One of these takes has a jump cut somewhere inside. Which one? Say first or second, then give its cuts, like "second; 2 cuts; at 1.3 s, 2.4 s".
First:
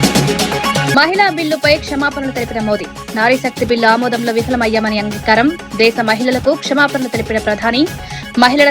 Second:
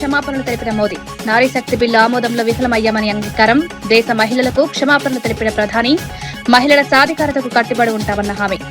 first; 1 cut; at 0.9 s